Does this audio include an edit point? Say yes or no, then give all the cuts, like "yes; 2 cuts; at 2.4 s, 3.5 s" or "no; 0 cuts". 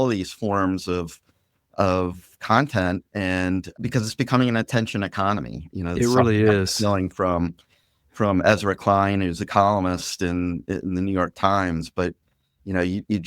yes; 1 cut; at 3.8 s